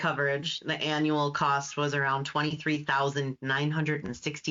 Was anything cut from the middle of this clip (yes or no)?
no